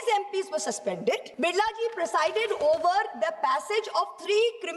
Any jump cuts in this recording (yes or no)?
yes